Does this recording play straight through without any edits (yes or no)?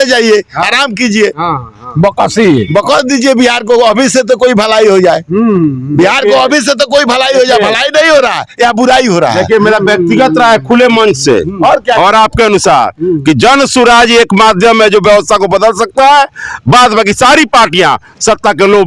yes